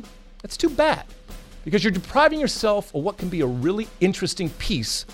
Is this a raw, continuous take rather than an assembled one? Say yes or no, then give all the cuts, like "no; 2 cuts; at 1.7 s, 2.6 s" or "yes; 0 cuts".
yes; 0 cuts